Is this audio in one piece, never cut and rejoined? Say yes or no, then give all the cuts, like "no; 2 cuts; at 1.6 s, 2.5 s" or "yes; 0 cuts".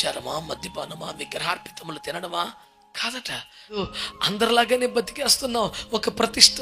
no; 1 cut; at 3.8 s